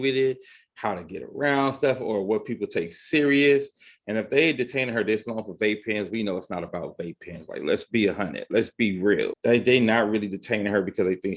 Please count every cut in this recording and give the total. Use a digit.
1